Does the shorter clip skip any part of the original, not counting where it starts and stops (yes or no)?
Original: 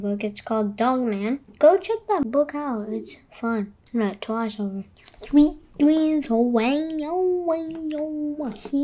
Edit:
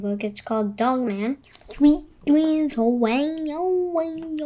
yes